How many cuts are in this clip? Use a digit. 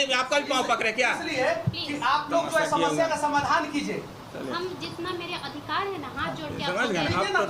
0